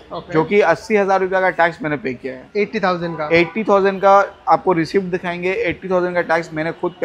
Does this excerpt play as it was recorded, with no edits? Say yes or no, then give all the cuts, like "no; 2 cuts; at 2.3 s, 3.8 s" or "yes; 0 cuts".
yes; 0 cuts